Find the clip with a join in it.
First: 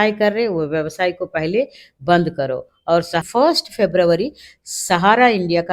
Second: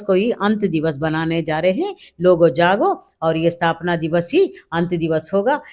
first; 1 cut; at 3.2 s

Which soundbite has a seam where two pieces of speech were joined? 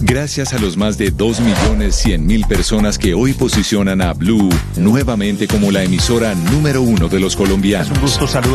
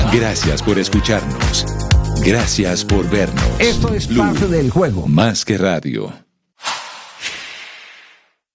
second; 1 cut; at 6.5 s

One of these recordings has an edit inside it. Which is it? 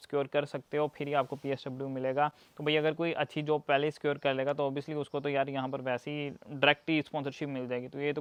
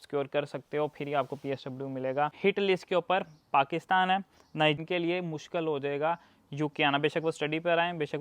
second; 2 cuts; at 2.3 s, 4.8 s

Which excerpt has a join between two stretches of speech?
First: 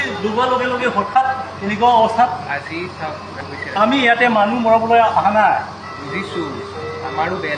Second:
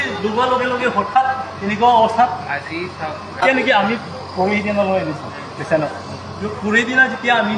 first; 1 cut; at 3.4 s

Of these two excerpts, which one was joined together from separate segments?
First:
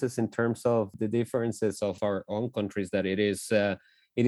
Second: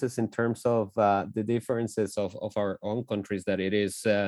first; 2 cuts; at 0.9 s, 2.0 s

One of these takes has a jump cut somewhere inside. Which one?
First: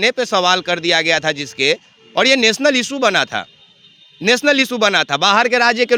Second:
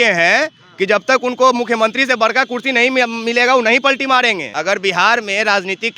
second; 1 cut; at 4.5 s

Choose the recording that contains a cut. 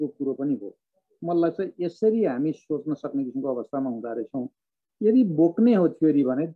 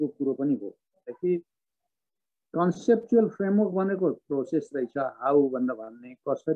second; 1 cut; at 1.1 s

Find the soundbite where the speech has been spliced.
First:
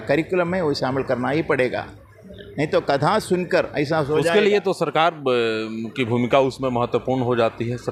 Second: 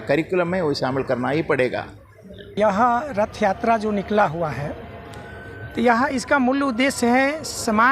second; 1 cut; at 2.5 s

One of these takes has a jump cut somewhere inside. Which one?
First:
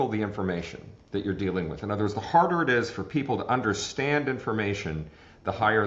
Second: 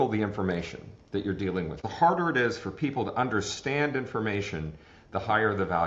second; 1 cut; at 1.8 s

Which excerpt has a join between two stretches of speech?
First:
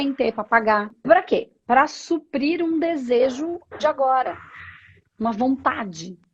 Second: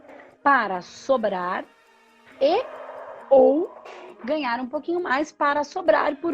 first; 1 cut; at 0.9 s

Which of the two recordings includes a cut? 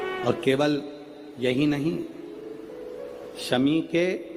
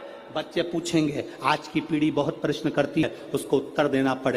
second; 1 cut; at 3.0 s

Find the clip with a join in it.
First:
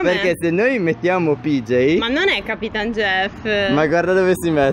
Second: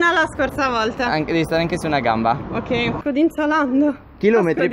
second; 1 cut; at 3.0 s

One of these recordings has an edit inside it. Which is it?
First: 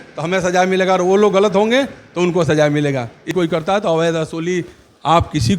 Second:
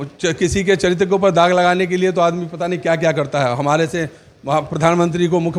first; 1 cut; at 3.3 s

